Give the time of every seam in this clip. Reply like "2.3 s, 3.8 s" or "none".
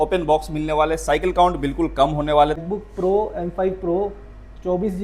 2.6 s